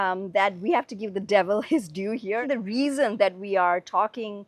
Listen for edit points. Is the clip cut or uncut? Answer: cut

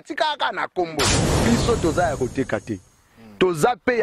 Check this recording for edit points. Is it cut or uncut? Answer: cut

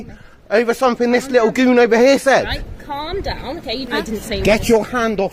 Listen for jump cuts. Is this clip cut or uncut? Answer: cut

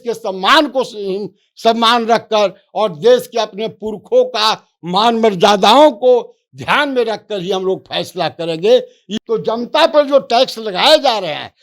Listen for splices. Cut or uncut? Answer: cut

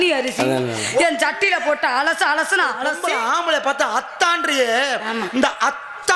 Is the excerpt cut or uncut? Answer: cut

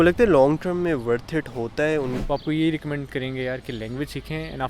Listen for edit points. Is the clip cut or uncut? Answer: cut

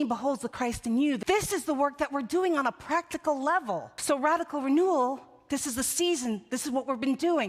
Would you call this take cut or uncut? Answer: cut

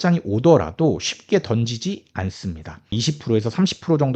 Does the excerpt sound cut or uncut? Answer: cut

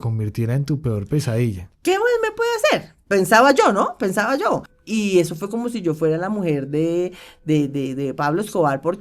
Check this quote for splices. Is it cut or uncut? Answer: cut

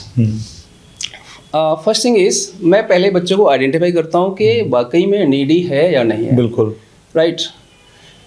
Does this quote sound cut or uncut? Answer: uncut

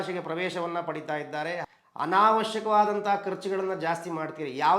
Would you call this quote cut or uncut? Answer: cut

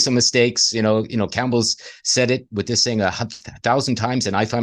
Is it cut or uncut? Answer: uncut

